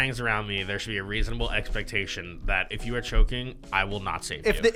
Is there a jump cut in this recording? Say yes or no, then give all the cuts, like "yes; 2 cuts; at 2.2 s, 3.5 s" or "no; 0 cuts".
no; 0 cuts